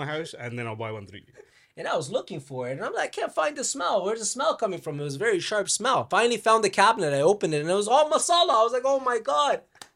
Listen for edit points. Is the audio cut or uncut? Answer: cut